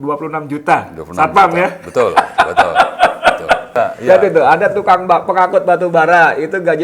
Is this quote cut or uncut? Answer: cut